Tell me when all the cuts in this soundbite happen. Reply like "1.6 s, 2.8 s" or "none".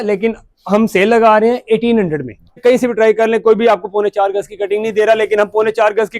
2.6 s

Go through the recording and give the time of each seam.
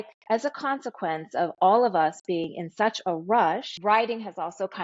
3.7 s

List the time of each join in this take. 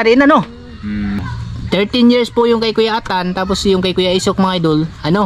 1.2 s

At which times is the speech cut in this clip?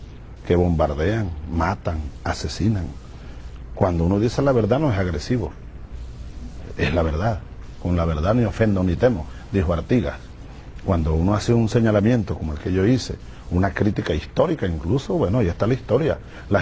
7.1 s

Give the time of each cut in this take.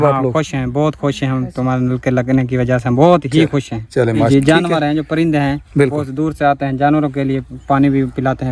4.2 s

